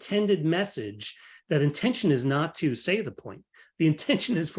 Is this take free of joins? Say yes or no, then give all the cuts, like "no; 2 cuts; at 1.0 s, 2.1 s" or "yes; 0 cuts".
yes; 0 cuts